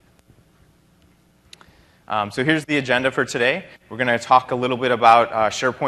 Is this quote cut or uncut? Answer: uncut